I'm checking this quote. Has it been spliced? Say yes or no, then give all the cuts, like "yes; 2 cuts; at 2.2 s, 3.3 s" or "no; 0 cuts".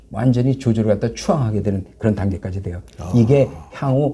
no; 0 cuts